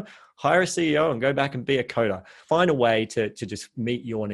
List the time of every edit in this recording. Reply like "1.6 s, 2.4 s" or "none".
2.4 s